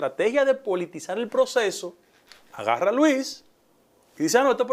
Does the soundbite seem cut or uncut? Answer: uncut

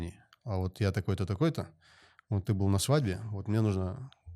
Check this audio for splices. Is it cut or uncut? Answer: uncut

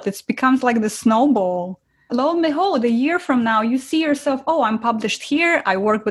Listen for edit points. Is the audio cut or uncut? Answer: uncut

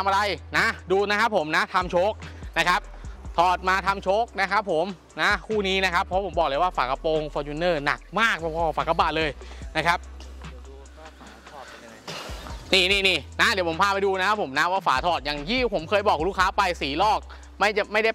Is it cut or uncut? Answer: uncut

